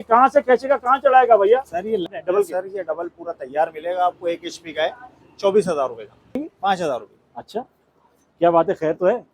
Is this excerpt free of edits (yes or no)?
no